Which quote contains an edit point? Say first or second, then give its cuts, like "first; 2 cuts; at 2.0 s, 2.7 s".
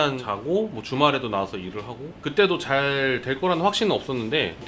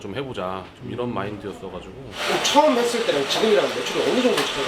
second; 1 cut; at 2.2 s